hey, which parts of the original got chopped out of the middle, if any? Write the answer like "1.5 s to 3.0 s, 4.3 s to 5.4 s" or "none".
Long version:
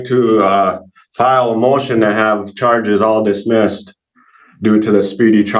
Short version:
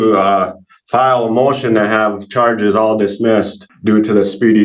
3.9 s to 4.4 s

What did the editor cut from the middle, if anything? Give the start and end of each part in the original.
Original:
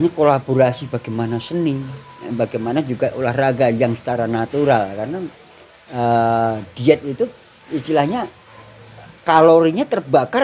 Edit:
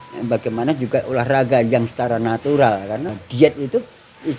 5.3 s to 6.7 s

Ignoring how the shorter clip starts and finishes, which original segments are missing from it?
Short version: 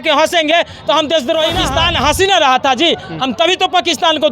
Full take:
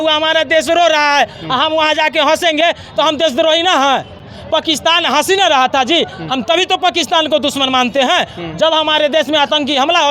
3.7 s to 4.7 s

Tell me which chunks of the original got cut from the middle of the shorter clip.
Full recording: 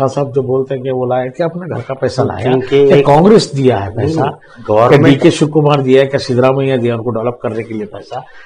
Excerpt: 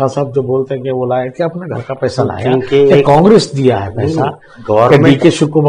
none

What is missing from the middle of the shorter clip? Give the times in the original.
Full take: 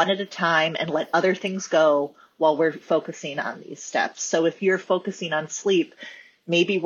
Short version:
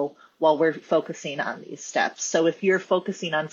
none

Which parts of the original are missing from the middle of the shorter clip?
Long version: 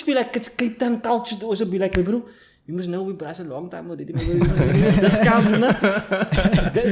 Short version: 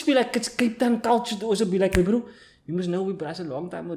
none

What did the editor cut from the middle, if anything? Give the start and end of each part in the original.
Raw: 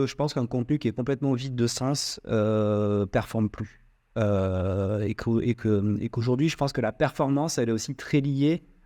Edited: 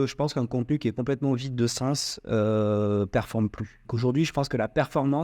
3.9 s to 6.1 s

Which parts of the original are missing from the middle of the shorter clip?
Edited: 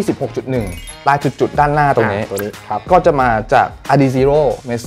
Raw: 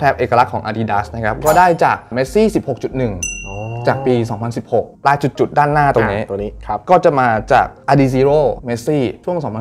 3.4 s to 4.9 s

